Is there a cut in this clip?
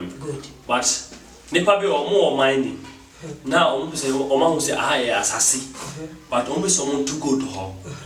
no; 0 cuts

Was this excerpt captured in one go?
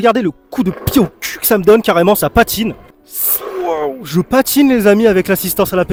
yes; 0 cuts

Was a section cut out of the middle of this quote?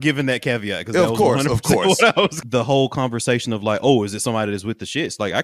yes; 1 cut; at 2.4 s

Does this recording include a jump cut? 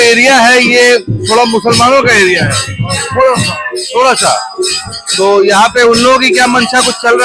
no; 0 cuts

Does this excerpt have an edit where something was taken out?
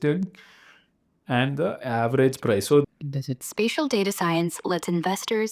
yes; 1 cut; at 2.9 s

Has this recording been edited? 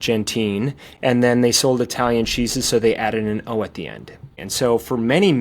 yes; 1 cut; at 4.3 s

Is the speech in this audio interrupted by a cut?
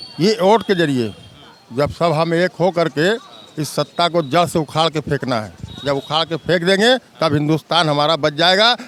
no; 0 cuts

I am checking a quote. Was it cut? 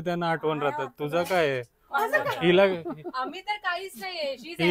no; 0 cuts

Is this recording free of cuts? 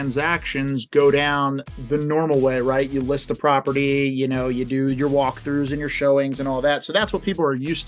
yes; 0 cuts

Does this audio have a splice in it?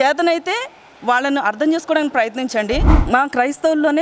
yes; 1 cut; at 2.9 s

